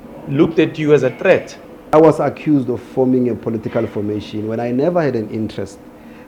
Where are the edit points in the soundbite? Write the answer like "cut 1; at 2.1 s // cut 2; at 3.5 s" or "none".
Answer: cut 1; at 1.8 s